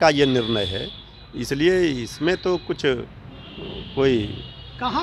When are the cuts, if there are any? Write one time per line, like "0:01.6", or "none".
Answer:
none